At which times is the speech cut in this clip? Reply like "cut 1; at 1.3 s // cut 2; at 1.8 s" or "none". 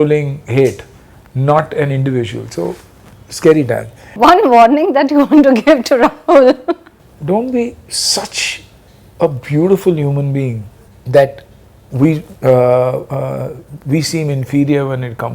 none